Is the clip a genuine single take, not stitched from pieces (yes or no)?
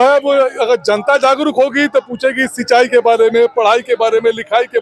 yes